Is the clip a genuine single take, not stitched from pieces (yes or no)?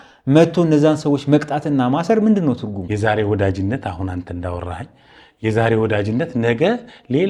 no